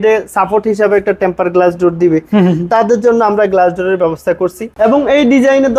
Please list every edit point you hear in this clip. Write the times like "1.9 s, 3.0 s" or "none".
4.6 s